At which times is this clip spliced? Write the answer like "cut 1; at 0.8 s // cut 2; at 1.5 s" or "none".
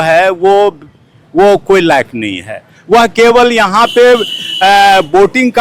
none